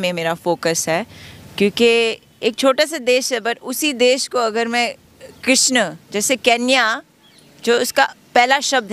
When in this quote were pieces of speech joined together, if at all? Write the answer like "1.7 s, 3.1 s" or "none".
none